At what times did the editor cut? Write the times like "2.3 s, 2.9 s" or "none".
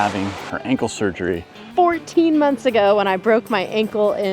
1.6 s